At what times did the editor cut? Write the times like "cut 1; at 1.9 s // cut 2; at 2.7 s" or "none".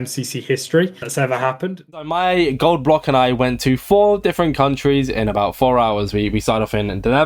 cut 1; at 1.8 s